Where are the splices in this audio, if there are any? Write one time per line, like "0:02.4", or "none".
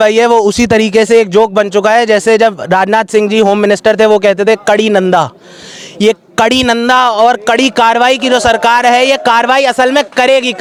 none